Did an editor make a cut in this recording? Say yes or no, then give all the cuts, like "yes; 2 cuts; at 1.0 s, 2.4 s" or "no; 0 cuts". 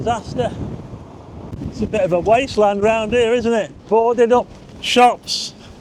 yes; 2 cuts; at 1.5 s, 3.8 s